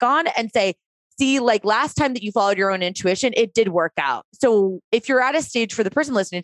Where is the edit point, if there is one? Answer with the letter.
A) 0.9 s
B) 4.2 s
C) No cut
B